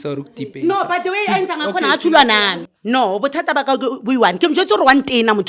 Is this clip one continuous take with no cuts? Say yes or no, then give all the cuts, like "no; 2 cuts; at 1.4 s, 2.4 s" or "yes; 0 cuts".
no; 1 cut; at 2.7 s